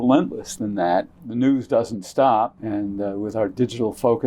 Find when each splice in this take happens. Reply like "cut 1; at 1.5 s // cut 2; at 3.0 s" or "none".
cut 1; at 1.2 s // cut 2; at 2.6 s